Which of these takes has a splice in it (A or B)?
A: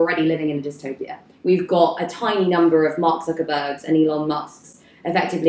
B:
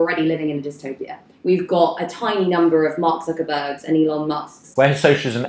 B